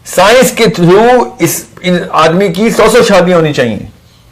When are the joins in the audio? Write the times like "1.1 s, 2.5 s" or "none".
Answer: none